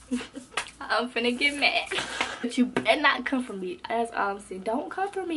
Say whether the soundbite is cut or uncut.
cut